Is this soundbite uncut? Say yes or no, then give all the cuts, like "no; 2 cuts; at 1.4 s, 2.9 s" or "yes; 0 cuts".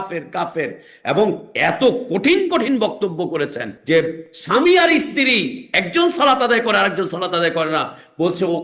no; 3 cuts; at 1.5 s, 3.7 s, 4.3 s